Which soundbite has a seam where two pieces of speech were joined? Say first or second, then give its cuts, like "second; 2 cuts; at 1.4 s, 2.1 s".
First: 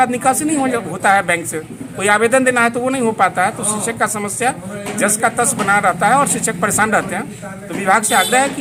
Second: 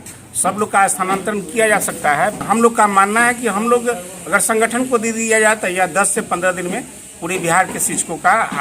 second; 1 cut; at 2.4 s